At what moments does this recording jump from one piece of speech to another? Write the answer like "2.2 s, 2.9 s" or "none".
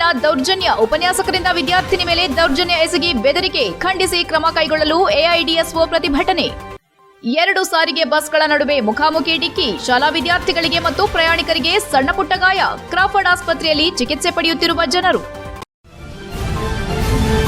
15.5 s